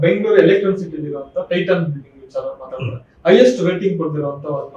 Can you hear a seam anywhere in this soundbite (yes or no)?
no